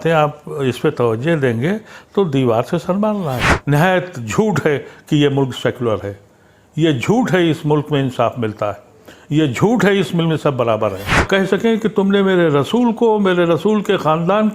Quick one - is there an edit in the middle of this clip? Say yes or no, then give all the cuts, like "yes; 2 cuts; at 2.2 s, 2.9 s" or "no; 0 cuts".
yes; 2 cuts; at 3.5 s, 11.3 s